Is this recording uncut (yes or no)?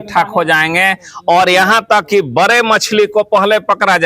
yes